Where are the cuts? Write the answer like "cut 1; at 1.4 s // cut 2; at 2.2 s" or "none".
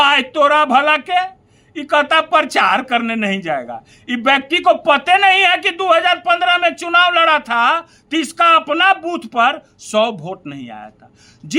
none